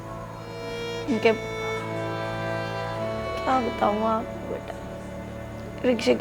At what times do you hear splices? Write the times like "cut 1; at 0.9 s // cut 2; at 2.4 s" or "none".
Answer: none